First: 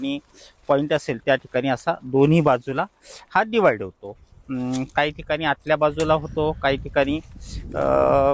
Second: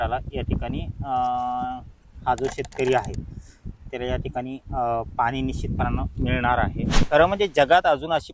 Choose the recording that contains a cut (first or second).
second